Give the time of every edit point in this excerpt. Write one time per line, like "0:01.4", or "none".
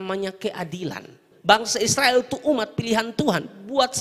0:01.3